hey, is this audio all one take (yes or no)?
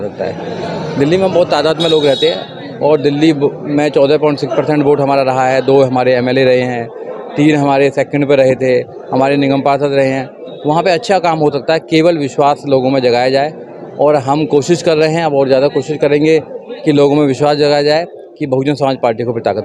yes